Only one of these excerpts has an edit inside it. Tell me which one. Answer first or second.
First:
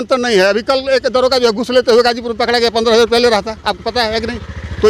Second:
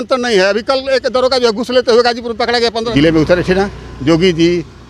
second